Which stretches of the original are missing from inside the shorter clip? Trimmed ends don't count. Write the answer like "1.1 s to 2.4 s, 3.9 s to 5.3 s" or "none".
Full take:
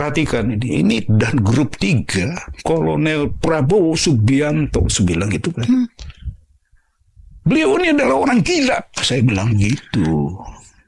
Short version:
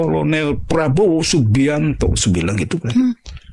none